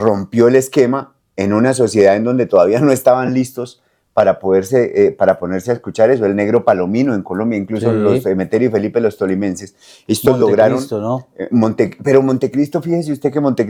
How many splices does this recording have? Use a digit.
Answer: 0